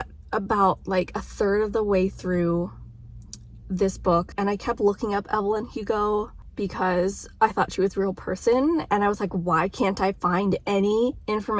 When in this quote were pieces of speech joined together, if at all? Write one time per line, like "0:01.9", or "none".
none